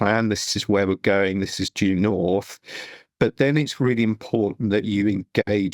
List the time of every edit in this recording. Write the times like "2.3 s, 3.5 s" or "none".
none